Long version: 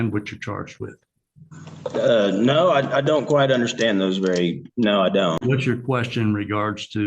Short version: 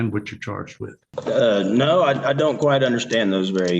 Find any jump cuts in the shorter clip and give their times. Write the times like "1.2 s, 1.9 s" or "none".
1.0 s